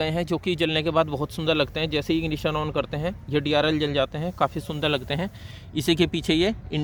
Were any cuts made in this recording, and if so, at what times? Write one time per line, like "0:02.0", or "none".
none